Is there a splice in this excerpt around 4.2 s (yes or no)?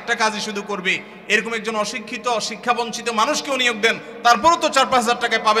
no